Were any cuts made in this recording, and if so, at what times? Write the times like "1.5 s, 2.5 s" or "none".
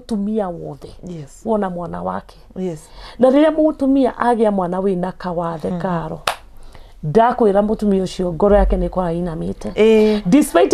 none